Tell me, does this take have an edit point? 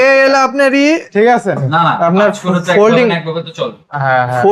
yes; 1 cut; at 1.7 s

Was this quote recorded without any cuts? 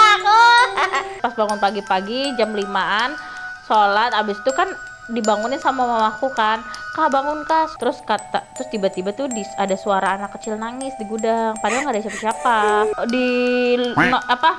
no; 3 cuts; at 1.1 s, 7.7 s, 12.9 s

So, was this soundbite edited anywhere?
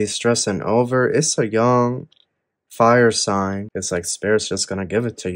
yes; 1 cut; at 3.7 s

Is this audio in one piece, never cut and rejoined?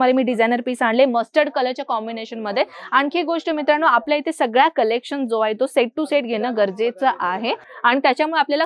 yes; 0 cuts

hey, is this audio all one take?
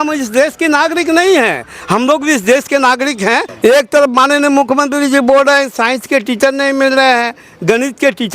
no; 1 cut; at 3.5 s

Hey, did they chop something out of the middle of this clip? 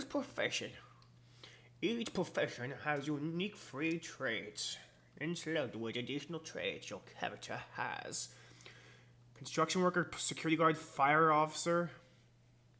yes; 1 cut; at 6.3 s

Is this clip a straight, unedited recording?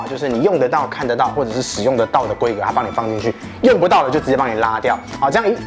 yes; 0 cuts

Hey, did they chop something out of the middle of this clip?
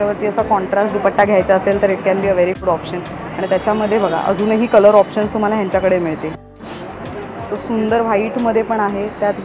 no; 0 cuts

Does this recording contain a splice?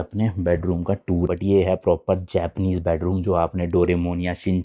yes; 1 cut; at 1.3 s

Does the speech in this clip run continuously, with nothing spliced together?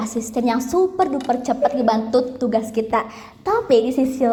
yes; 0 cuts

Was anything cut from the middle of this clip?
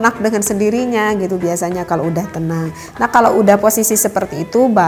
no; 0 cuts

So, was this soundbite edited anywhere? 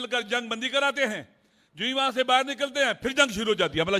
no; 0 cuts

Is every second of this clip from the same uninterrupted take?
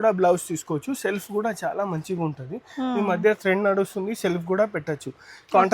yes; 0 cuts

